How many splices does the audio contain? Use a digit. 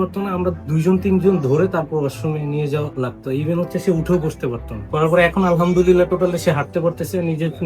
1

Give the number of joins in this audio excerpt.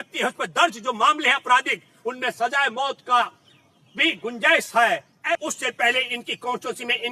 1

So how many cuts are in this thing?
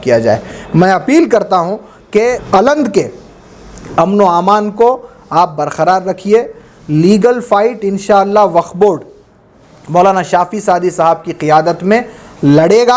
1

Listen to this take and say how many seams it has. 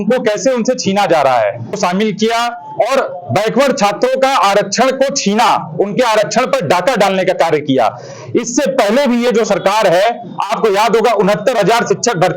1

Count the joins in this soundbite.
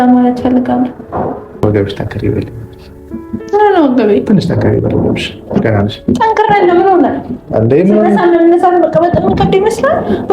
1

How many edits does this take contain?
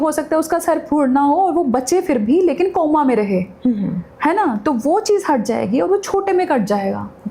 0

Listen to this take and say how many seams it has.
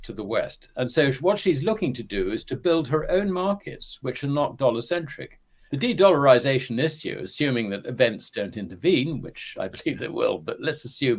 1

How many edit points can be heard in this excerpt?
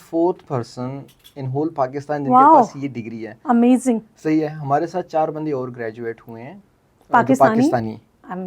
0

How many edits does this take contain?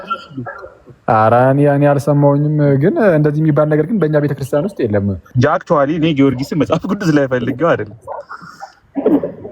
1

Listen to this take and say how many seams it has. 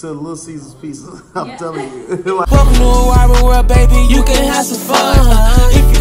1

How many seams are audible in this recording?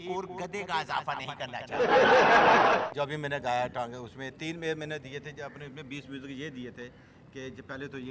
2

